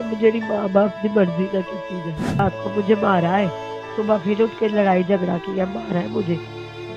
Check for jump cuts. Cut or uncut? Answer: cut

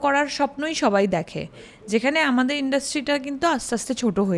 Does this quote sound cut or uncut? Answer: uncut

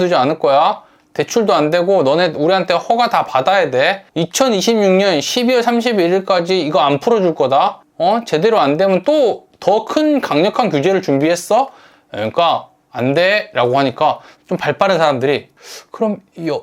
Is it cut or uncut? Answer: uncut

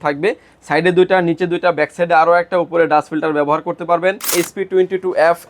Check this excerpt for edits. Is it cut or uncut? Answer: cut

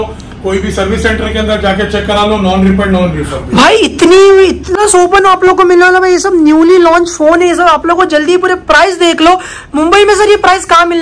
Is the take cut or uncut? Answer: cut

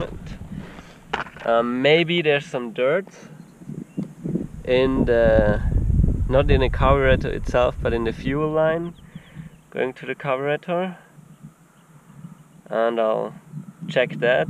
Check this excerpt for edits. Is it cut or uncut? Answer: uncut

